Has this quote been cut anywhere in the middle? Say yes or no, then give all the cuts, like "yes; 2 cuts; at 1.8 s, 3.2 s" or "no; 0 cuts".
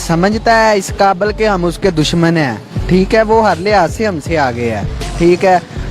no; 0 cuts